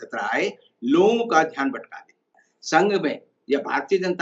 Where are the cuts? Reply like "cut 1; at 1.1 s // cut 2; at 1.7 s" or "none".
cut 1; at 2.4 s

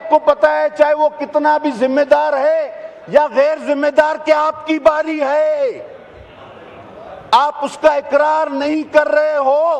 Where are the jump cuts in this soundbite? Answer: none

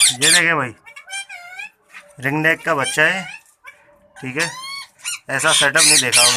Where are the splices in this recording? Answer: none

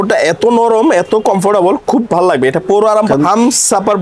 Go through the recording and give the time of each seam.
cut 1; at 3.1 s

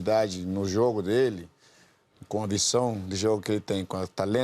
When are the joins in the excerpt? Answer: none

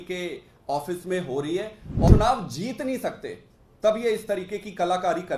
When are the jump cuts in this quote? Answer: cut 1; at 2.1 s

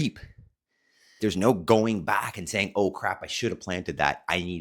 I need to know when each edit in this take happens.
cut 1; at 1.2 s

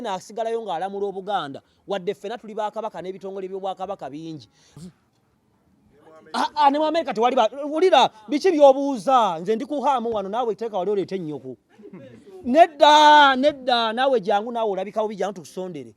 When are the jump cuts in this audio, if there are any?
cut 1; at 4.8 s

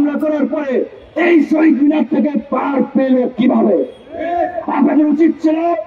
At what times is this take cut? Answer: none

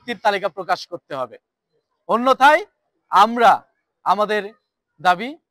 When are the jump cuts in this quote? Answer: none

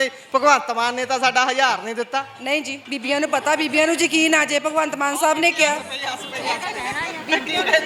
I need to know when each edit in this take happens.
none

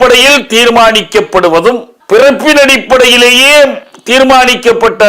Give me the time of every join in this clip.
cut 1; at 1.9 s

